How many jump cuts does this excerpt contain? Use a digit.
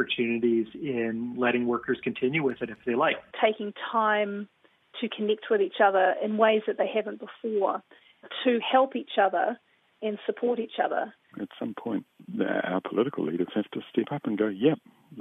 3